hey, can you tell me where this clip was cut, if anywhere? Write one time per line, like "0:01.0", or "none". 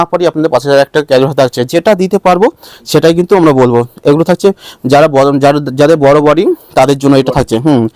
none